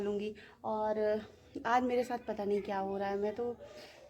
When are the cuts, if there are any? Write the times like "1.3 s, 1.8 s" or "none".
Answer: none